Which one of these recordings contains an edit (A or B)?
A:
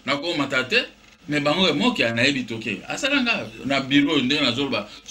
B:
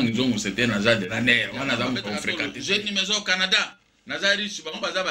B